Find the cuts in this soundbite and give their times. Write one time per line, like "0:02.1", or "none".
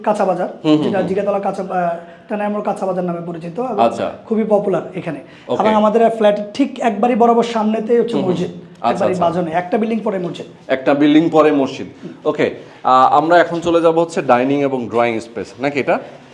none